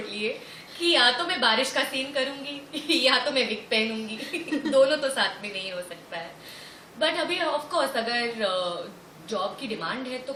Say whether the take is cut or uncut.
uncut